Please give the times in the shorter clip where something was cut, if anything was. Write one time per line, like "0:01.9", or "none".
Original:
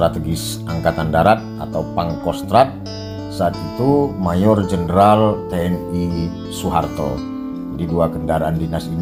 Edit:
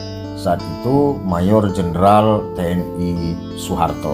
none

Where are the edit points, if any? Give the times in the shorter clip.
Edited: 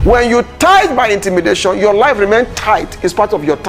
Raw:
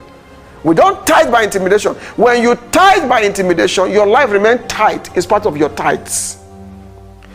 none

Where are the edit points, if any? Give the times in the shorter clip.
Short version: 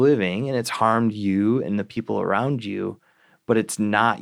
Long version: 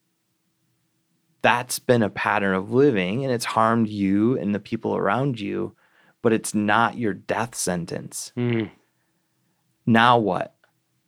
none

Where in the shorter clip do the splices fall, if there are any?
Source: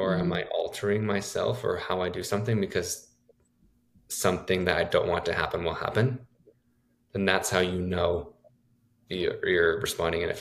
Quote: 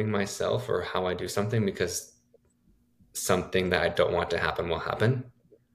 none

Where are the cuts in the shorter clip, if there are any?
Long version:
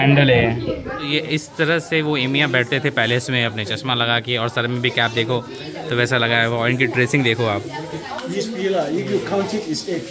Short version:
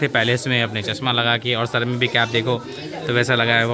none

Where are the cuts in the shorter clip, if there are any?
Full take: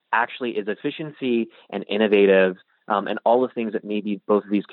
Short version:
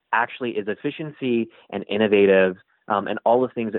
none

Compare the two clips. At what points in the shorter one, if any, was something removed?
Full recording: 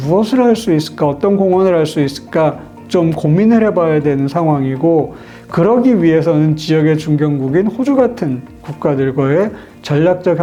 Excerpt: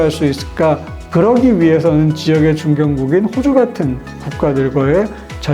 0:00.9

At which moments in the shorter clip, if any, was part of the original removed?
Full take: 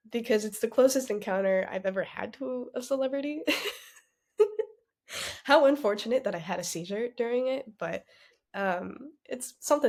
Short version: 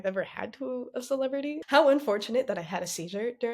0:01.6

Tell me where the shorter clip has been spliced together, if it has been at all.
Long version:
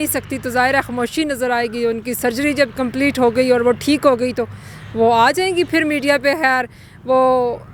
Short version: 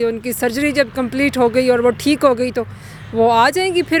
none

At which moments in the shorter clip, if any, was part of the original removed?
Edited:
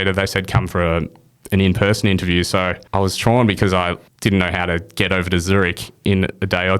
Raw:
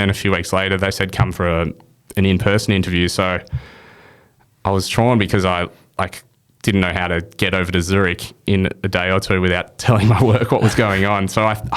0:02.8
0:04.1

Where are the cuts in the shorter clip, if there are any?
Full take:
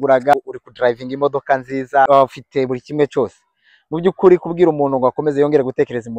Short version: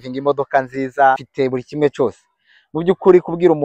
0:01.1

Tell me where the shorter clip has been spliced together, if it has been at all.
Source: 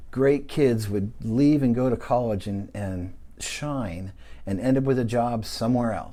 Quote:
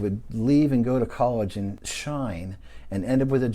0:01.8

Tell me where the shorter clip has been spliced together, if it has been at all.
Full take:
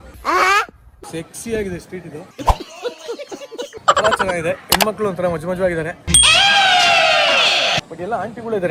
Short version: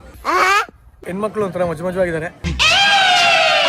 0:01.2

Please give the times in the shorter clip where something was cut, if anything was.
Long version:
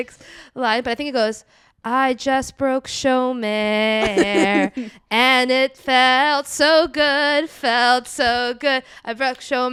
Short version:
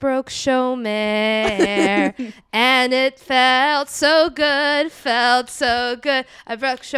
none

